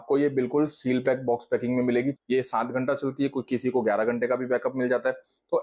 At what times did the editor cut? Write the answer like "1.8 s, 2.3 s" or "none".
2.2 s